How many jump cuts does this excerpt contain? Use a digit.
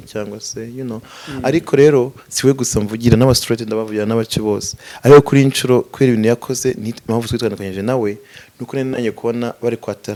0